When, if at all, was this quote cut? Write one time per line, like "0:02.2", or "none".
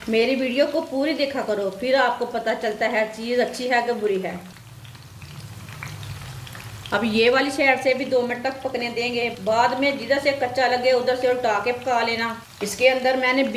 none